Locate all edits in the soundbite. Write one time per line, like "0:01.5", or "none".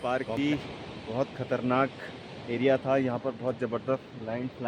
none